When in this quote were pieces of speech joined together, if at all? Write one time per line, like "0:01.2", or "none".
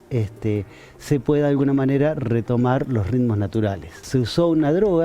0:03.9